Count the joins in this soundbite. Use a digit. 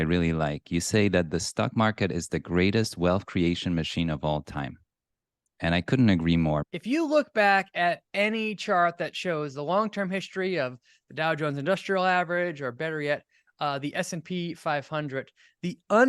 1